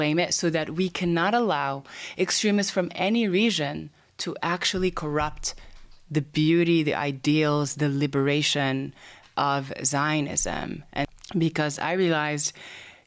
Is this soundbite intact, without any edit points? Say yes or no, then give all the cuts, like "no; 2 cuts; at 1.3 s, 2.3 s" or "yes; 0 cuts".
no; 1 cut; at 11.0 s